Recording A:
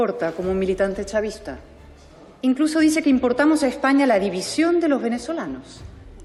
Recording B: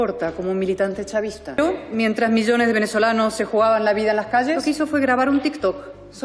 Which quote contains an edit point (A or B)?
B